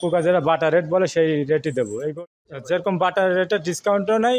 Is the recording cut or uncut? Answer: cut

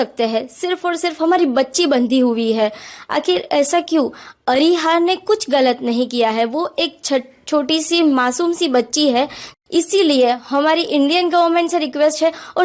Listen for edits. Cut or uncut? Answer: cut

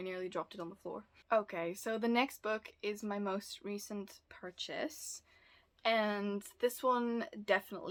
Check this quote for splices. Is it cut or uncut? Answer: uncut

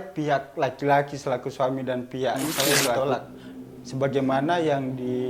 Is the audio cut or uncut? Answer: cut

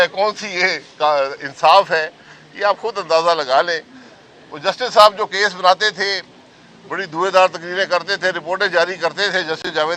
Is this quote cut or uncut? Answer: uncut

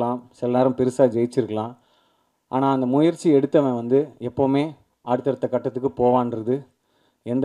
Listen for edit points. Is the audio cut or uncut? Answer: uncut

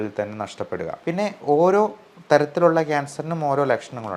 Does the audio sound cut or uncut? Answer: cut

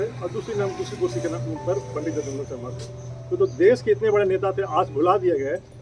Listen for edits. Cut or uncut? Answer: uncut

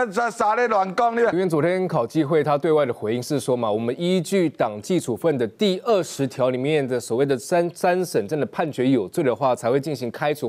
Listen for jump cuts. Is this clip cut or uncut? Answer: cut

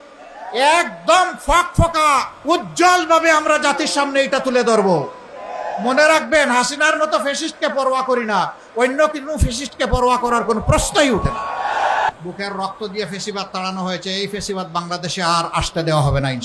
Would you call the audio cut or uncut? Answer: cut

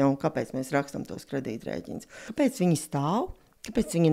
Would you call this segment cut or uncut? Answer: cut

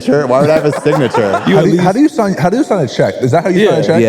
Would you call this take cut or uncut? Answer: cut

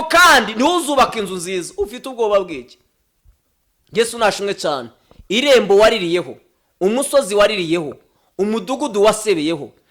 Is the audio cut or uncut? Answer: uncut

